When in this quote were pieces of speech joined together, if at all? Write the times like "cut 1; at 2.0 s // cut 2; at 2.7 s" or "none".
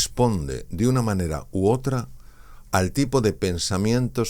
none